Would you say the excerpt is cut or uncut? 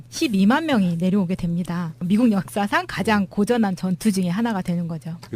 uncut